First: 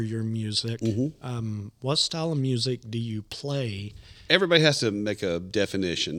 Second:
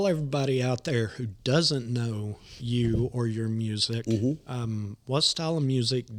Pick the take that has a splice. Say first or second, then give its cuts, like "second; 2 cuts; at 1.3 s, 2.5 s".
first; 1 cut; at 4.1 s